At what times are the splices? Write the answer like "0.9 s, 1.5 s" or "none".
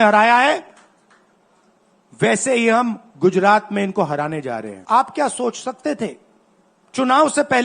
4.7 s